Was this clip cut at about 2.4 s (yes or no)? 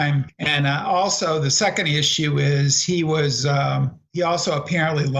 no